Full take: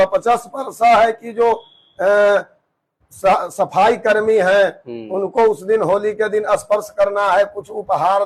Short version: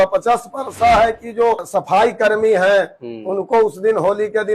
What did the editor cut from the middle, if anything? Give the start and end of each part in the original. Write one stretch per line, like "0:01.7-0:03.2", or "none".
0:01.6-0:03.5